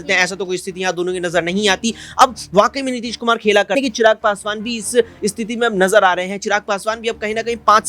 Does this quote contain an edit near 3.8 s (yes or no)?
yes